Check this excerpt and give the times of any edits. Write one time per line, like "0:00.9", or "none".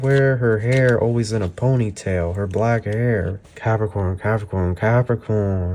0:03.4